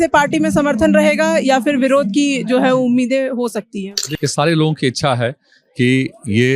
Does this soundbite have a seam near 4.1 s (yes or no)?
yes